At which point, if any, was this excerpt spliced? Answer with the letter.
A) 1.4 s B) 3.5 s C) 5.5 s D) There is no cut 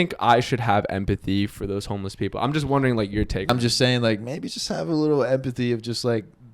B